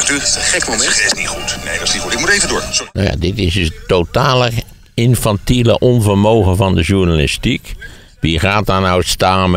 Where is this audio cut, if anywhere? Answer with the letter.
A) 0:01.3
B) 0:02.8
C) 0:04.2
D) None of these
B